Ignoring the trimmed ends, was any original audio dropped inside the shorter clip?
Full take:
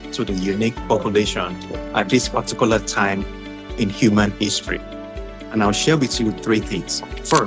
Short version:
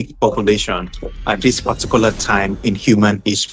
yes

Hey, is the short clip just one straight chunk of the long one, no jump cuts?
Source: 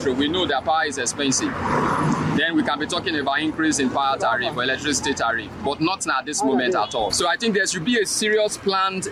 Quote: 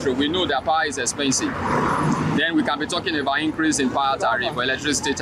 yes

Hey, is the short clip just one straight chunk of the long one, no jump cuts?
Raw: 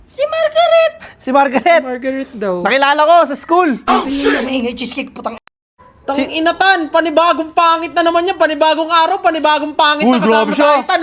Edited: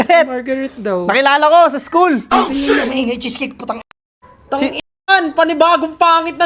yes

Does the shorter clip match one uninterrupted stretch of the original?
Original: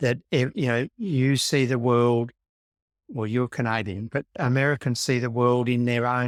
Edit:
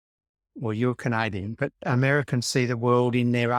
yes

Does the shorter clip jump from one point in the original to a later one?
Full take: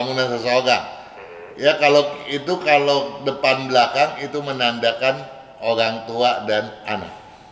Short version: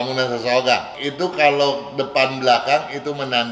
yes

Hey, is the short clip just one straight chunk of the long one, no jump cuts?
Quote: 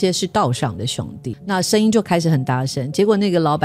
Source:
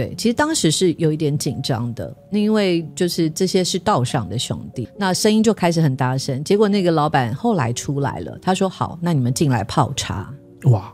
yes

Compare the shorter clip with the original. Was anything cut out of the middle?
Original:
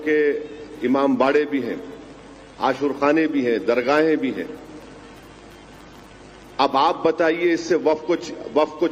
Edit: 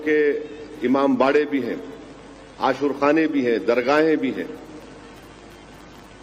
no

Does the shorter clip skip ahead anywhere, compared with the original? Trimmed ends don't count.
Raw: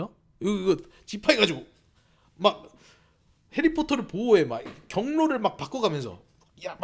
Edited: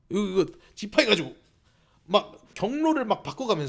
yes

